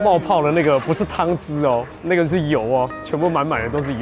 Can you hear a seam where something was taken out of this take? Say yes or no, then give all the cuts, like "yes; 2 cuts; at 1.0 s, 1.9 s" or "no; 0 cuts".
yes; 1 cut; at 1.9 s